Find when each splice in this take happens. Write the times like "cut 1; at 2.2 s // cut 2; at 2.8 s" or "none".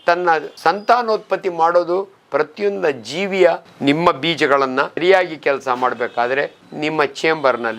cut 1; at 3.7 s // cut 2; at 5.0 s